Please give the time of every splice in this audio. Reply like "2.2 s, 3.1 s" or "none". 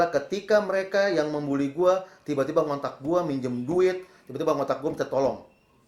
none

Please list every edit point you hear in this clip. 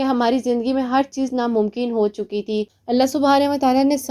2.7 s

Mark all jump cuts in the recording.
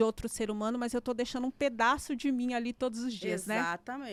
none

